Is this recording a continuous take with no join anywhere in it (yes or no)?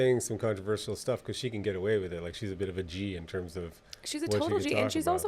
yes